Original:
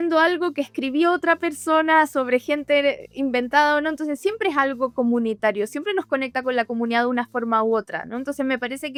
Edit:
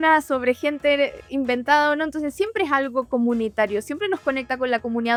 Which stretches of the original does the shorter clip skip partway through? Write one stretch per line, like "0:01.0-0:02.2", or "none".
none

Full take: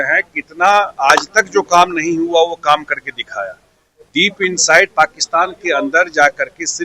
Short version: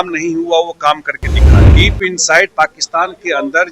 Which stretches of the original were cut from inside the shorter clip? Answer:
0:03.5-0:04.1

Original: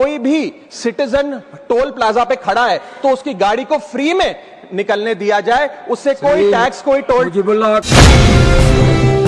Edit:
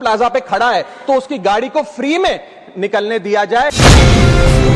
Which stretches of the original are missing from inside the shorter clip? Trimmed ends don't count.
0:05.7-0:07.9

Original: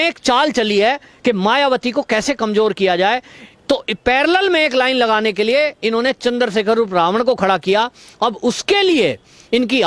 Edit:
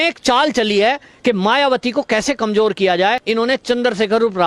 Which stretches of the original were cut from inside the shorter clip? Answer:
0:03.2-0:05.8

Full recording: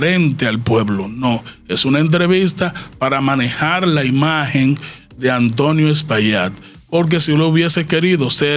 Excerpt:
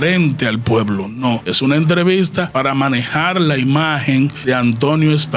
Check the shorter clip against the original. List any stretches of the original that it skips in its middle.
0:01.5-0:01.7
0:02.7-0:03.0
0:04.8-0:05.1

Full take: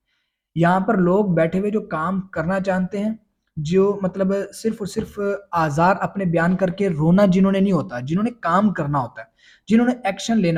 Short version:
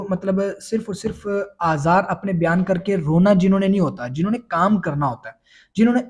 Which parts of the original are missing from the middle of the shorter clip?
none

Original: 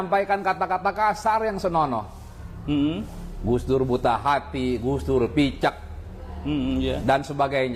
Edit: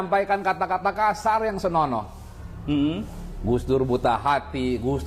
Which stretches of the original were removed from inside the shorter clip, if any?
none

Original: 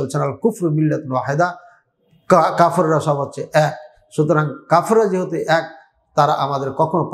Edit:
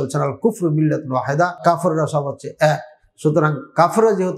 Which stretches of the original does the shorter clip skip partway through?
0:01.6-0:02.5

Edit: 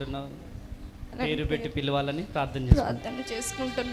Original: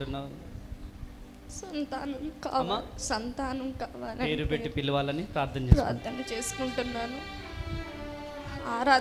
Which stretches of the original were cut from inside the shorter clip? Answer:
0:01.1-0:04.1

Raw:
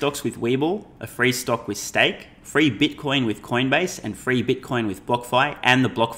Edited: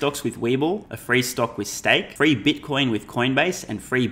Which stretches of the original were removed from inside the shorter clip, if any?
0:00.9-0:01.0
0:02.2-0:02.4

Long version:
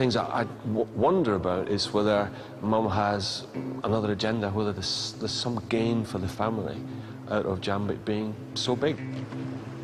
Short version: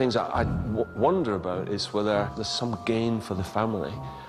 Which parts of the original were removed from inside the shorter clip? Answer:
0:02.4-0:05.3

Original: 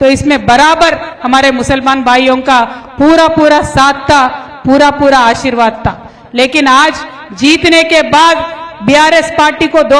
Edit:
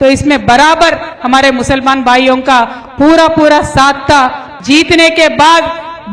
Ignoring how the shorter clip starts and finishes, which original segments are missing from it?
0:04.5-0:07.2

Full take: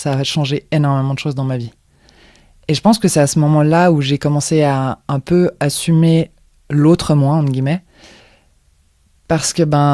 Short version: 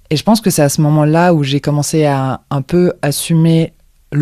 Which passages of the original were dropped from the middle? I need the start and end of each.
none

